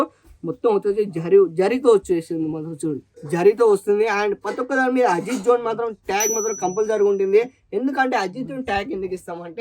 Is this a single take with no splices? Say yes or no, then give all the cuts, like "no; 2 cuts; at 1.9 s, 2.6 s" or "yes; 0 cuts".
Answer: yes; 0 cuts